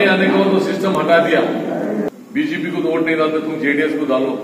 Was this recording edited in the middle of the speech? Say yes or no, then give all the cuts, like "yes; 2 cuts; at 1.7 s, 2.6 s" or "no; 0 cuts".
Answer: yes; 1 cut; at 2.1 s